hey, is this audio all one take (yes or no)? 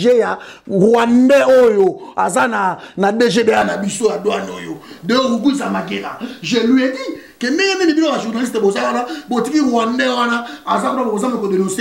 yes